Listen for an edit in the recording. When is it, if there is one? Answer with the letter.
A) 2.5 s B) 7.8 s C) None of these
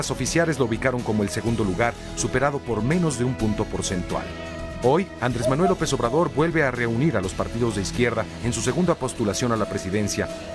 B